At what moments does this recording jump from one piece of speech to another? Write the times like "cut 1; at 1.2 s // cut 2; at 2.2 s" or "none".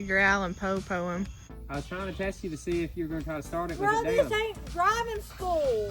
cut 1; at 1.4 s